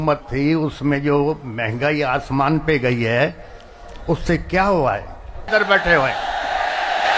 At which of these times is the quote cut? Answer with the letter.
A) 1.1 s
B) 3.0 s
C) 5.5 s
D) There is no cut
C